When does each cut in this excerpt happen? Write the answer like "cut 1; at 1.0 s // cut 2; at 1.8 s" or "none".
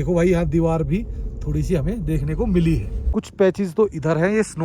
cut 1; at 3.0 s

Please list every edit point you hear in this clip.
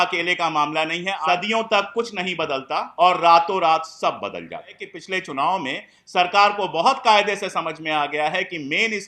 cut 1; at 1.2 s // cut 2; at 2.9 s // cut 3; at 4.9 s

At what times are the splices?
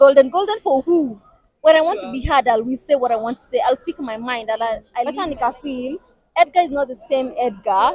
cut 1; at 5.1 s

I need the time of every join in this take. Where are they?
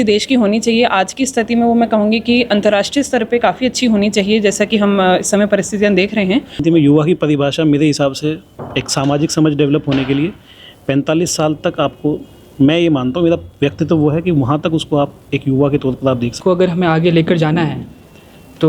cut 1; at 6.6 s // cut 2; at 16.4 s

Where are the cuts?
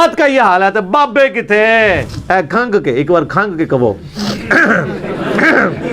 cut 1; at 2.1 s

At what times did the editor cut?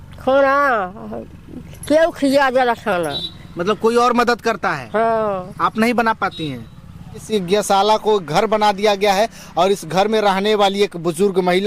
cut 1; at 7.3 s

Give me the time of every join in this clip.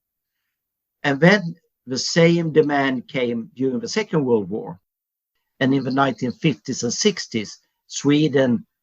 cut 1; at 4.9 s

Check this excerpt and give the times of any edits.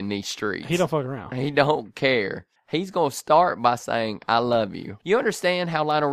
cut 1; at 4.9 s

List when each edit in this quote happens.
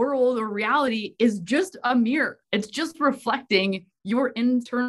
none

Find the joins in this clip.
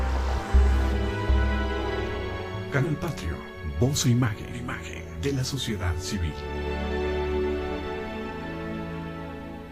cut 1; at 3.0 s

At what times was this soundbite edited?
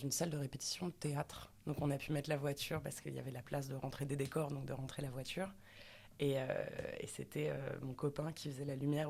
none

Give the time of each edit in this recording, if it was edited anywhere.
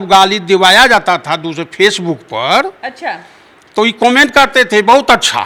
none

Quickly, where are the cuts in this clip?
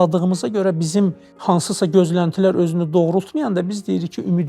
cut 1; at 1.3 s

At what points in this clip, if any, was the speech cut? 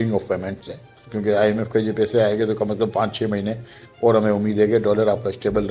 cut 1; at 1.0 s

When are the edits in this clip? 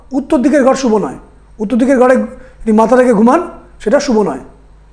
none

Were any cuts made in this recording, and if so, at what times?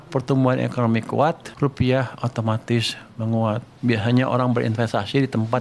cut 1; at 1.5 s // cut 2; at 3.7 s

